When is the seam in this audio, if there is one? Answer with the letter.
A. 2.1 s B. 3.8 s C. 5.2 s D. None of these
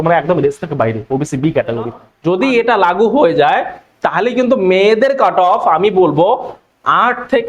A